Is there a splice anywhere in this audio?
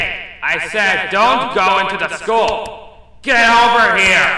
no; 0 cuts

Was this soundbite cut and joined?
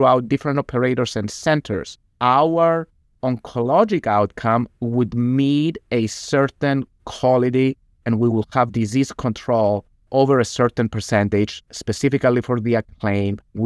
no; 0 cuts

